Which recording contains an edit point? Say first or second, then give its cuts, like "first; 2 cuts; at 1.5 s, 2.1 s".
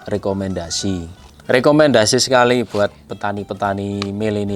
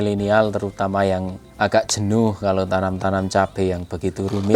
first; 1 cut; at 1.1 s